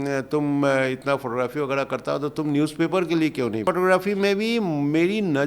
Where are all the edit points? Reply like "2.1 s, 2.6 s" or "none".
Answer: 3.6 s